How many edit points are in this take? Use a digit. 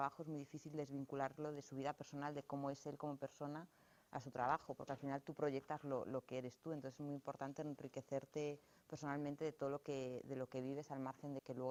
0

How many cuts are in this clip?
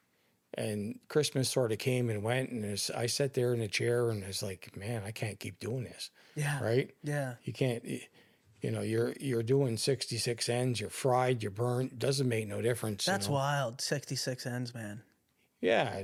0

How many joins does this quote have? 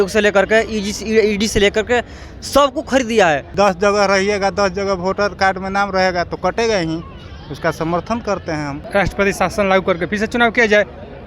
2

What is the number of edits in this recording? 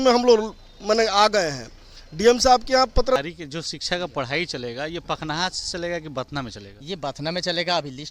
1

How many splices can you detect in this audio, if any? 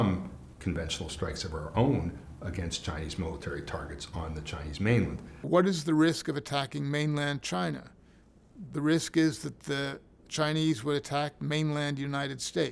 1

